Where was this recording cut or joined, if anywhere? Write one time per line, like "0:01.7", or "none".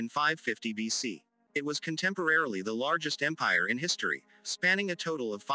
0:01.3